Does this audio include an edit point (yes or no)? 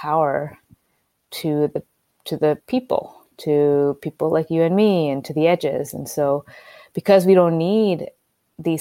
no